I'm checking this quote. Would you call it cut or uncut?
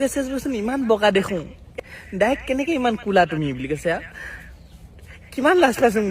cut